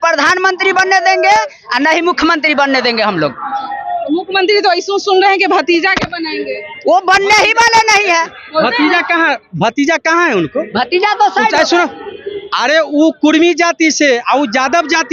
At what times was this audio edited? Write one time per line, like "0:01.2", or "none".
none